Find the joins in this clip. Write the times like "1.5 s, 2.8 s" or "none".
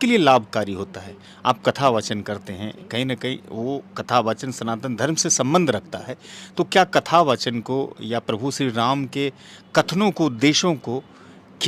none